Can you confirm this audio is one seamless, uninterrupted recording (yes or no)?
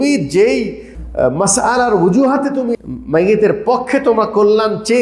no